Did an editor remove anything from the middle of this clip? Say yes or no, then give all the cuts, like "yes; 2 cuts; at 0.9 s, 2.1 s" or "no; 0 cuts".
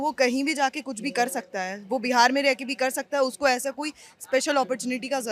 no; 0 cuts